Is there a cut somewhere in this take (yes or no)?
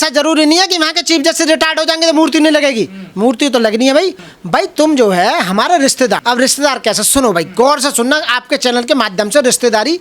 yes